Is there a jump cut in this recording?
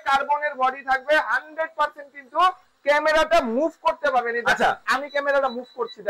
no; 0 cuts

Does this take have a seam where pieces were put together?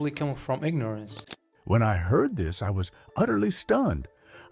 yes; 1 cut; at 1.2 s

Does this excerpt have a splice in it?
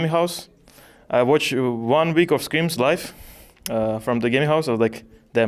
no; 0 cuts

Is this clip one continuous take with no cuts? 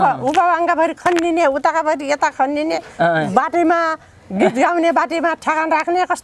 yes; 0 cuts

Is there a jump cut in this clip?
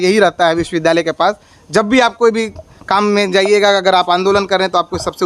no; 0 cuts

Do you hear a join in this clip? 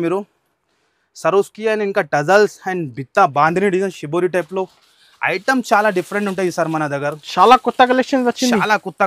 no; 0 cuts

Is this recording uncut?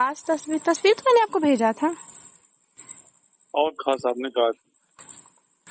no; 1 cut; at 4.0 s

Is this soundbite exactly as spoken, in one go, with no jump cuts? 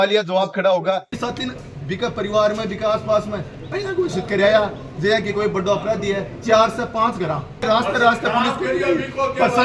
no; 2 cuts; at 1.1 s, 7.6 s

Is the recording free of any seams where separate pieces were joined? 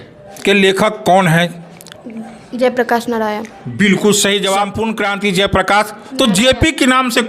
no; 1 cut; at 4.8 s

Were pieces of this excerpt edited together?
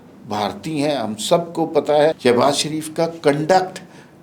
yes; 1 cut; at 2.2 s

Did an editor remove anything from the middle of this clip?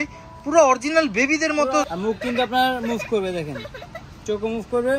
yes; 1 cut; at 1.9 s

